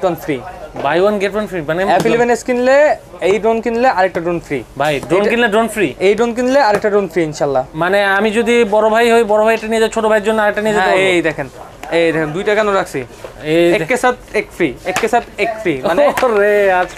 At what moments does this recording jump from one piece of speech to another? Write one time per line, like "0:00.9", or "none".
none